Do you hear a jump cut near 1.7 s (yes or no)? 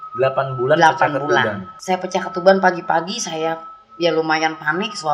yes